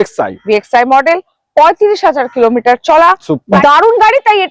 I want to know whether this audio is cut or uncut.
cut